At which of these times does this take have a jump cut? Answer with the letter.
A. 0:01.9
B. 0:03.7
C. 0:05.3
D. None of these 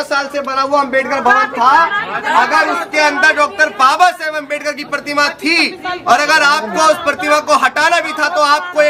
D